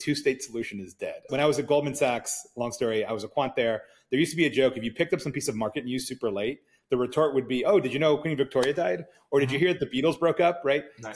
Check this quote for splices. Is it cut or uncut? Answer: cut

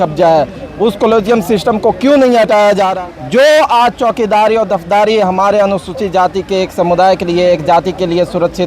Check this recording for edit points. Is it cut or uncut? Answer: cut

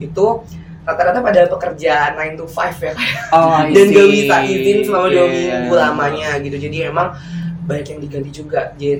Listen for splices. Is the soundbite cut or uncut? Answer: uncut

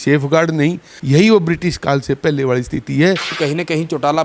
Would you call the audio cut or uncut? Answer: cut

